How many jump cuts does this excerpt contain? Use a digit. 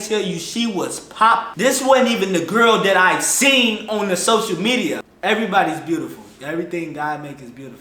2